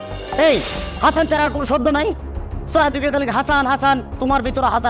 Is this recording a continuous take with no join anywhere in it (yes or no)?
yes